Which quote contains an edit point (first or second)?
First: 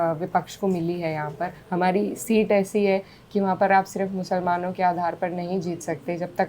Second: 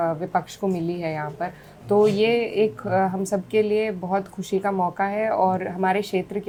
first